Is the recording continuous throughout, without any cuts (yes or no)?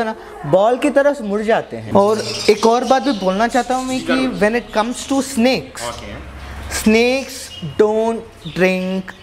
no